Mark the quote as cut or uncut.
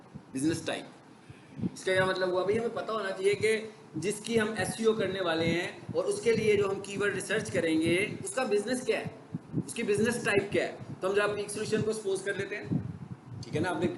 uncut